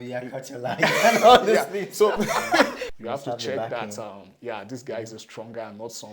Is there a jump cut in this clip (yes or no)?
yes